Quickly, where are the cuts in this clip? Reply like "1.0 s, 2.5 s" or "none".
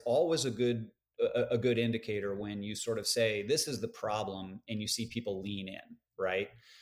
1.0 s